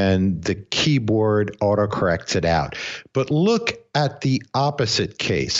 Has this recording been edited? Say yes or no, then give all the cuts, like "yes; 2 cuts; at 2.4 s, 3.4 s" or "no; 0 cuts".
no; 0 cuts